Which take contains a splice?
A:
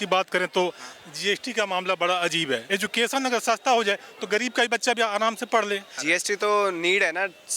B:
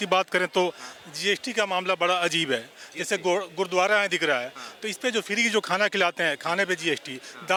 A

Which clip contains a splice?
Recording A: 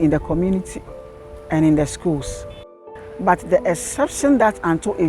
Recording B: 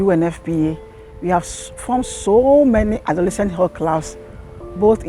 A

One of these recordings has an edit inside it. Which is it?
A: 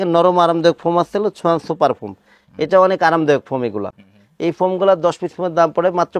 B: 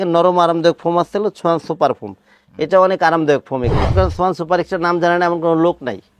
B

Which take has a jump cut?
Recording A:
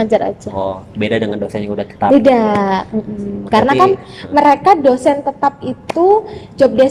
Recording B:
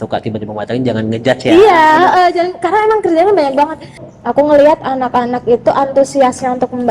B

